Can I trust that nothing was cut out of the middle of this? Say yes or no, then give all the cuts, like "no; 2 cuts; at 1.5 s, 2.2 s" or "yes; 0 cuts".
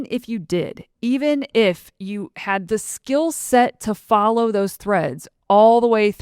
no; 1 cut; at 2.6 s